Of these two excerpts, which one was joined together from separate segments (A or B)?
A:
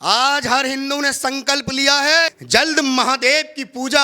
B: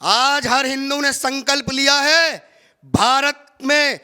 A